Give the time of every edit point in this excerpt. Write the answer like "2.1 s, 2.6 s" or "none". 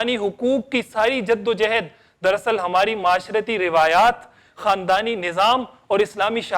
none